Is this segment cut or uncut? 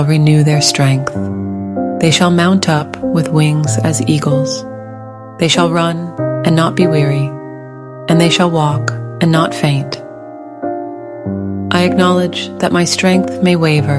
uncut